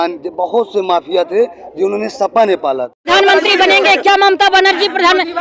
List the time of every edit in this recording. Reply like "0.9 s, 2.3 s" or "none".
3.1 s